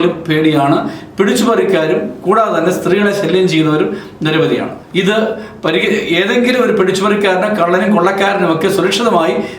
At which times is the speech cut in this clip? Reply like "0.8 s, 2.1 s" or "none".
4.8 s